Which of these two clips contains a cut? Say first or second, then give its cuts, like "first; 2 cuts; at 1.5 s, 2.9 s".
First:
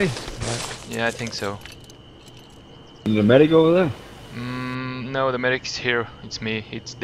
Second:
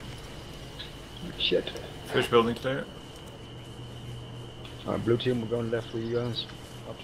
first; 1 cut; at 2.9 s